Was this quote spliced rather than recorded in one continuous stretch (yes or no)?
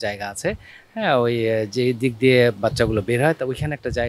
no